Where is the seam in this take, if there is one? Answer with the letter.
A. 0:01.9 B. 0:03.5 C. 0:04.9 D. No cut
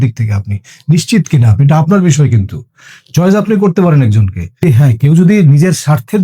C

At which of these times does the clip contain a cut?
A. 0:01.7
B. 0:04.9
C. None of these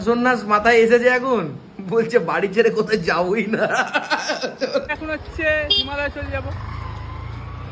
B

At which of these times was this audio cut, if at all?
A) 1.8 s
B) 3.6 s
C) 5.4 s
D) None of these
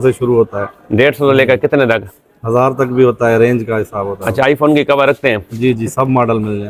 D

